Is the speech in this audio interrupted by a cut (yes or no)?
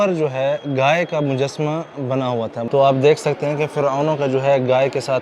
yes